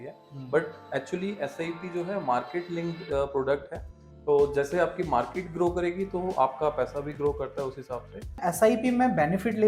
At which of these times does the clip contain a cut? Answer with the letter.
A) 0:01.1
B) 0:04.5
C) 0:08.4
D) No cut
C